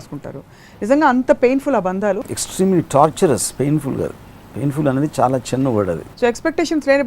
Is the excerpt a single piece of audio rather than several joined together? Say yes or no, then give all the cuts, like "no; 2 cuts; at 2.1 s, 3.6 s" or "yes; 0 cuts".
no; 2 cuts; at 2.2 s, 6.0 s